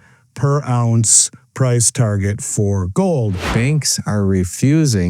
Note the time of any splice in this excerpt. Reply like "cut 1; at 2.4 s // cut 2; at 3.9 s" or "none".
cut 1; at 3.5 s